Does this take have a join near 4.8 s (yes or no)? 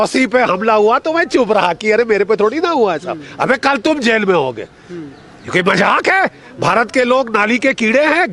no